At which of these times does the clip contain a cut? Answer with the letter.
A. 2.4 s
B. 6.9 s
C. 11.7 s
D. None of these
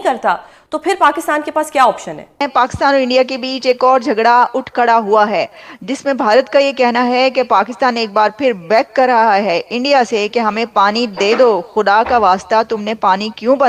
A